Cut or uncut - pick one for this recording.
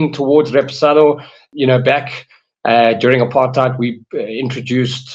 cut